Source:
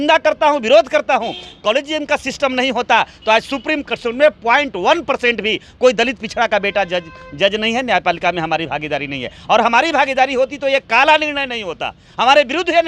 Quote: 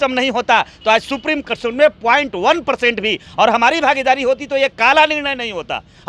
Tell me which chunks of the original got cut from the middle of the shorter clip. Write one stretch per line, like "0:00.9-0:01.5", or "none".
0:05.6-0:09.3